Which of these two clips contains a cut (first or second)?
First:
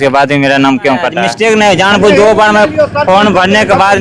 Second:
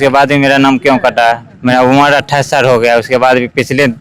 first